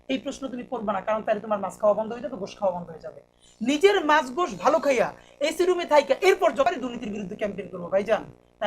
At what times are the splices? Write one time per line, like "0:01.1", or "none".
0:06.7